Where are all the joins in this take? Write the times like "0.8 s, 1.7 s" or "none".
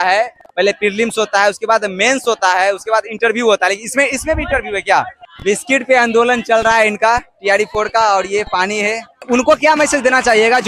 5.2 s, 9.1 s